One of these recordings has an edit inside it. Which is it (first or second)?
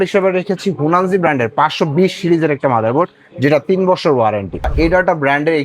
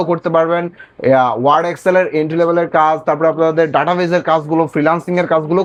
first